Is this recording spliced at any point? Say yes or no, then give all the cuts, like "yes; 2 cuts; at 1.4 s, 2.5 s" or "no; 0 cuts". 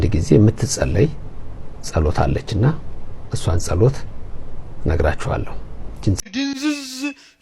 yes; 1 cut; at 6.2 s